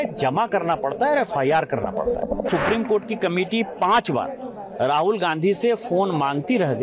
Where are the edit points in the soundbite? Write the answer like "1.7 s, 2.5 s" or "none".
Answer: 2.5 s